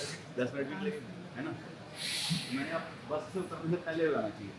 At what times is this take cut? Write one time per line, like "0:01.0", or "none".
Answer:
none

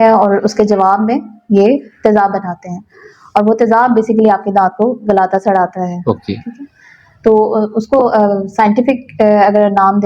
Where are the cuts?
none

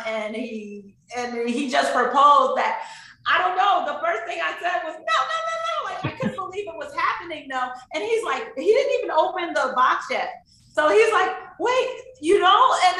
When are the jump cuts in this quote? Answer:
none

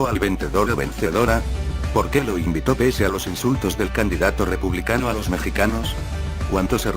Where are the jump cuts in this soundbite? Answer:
none

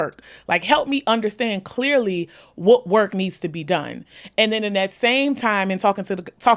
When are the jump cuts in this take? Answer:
none

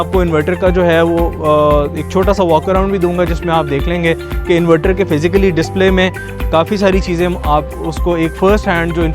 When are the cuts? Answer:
none

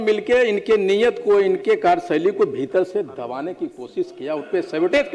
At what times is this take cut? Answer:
none

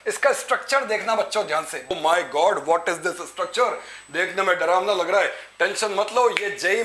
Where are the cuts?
0:01.9

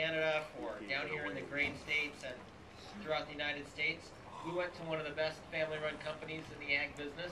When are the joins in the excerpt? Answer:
0:02.7

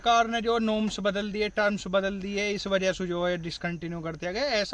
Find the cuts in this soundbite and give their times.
none

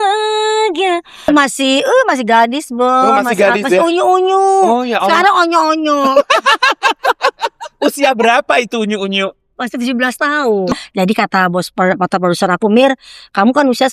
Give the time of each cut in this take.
0:01.3
0:10.7

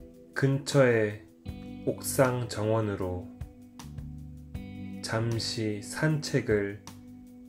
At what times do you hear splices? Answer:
none

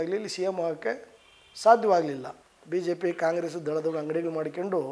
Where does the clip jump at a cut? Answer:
0:02.4

